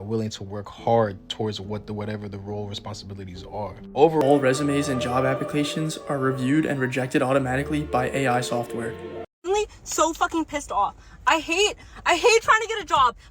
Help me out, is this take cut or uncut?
cut